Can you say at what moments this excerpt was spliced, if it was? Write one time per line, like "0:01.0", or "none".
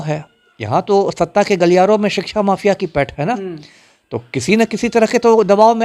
none

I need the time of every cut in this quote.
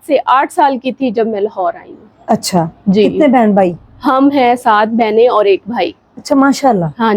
none

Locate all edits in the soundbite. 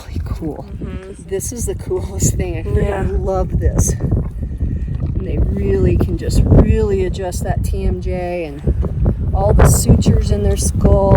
0:01.0

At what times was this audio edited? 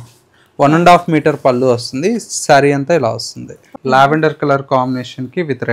0:03.7

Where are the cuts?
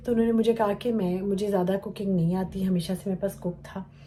none

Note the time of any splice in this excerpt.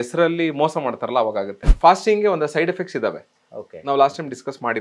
0:01.7

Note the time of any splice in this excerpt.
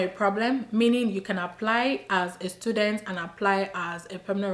none

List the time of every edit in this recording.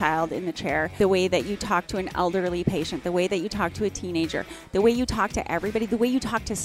0:00.9

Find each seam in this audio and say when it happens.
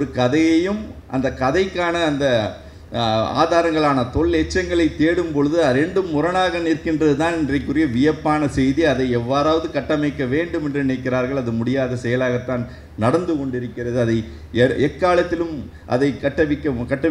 none

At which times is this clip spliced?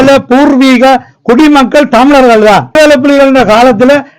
0:02.7

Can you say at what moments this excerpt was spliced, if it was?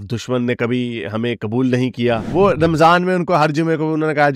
0:02.2

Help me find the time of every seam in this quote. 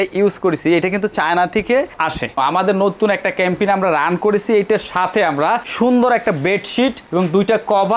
0:02.4

